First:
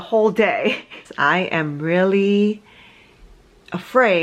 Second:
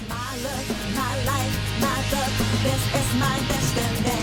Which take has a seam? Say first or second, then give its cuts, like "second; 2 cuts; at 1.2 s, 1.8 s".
first; 1 cut; at 0.9 s